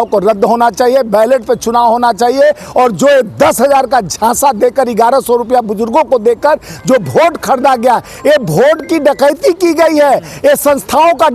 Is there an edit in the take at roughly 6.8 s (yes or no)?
no